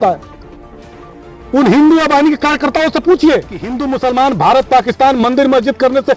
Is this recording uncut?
no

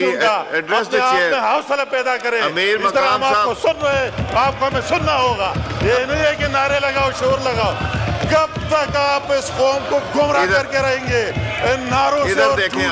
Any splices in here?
no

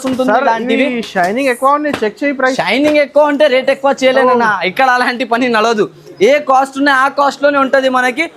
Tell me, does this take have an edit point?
no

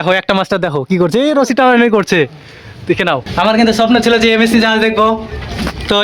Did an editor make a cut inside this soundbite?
yes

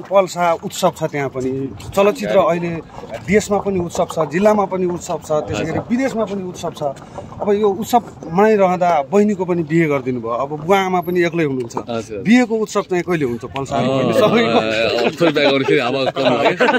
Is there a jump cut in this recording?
no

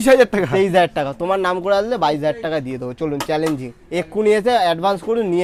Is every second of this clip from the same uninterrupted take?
yes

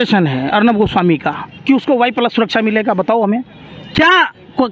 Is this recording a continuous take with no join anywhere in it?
yes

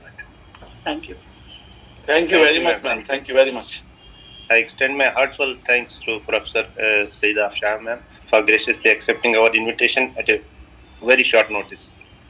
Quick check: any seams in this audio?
no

